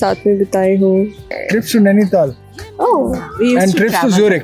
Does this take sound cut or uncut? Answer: cut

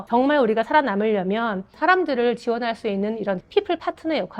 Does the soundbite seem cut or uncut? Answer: cut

